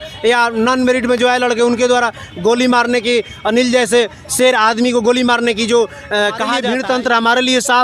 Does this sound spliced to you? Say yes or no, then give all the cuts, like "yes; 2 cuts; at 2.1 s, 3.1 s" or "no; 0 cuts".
yes; 1 cut; at 6.6 s